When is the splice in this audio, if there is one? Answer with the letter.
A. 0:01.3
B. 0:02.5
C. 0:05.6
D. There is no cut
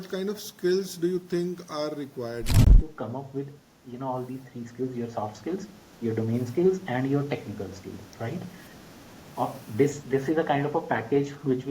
B